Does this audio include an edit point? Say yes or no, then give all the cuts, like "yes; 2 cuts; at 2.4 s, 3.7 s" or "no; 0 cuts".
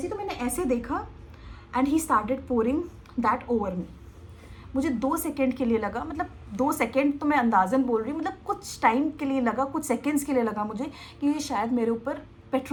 no; 0 cuts